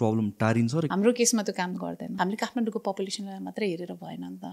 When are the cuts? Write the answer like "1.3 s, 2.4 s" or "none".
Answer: 0.9 s, 2.1 s